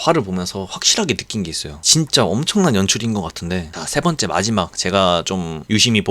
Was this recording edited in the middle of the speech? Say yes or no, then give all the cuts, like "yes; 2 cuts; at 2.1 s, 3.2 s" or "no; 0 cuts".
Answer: yes; 1 cut; at 3.7 s